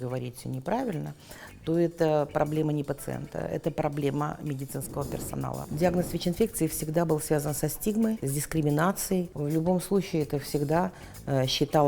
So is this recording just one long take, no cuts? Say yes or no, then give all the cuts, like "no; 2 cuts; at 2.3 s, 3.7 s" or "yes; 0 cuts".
no; 3 cuts; at 5.6 s, 8.2 s, 9.3 s